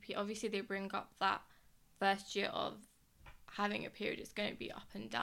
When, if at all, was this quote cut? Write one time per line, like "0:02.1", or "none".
none